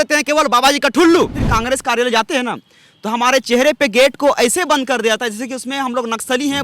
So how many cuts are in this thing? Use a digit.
1